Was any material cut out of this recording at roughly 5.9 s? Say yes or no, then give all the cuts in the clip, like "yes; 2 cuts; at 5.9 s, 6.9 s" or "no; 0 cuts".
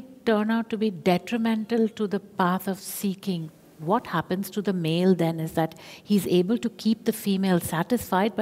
no; 1 cut; at 3.6 s